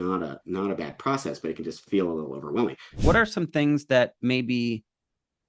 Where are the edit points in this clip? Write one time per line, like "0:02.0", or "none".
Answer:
0:03.0